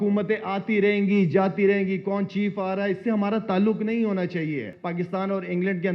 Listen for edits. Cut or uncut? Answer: cut